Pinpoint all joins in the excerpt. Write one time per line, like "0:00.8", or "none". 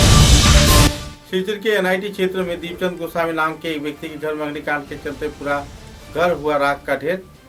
0:01.1